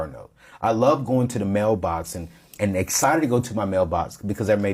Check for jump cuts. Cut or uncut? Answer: uncut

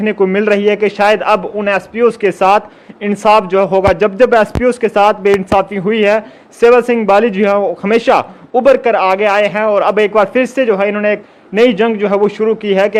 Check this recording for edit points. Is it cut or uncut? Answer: uncut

